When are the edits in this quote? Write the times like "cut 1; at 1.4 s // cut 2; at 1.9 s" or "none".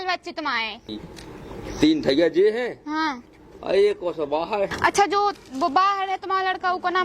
cut 1; at 1.0 s // cut 2; at 4.7 s